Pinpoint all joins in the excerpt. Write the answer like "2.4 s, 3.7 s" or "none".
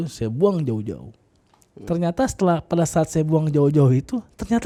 none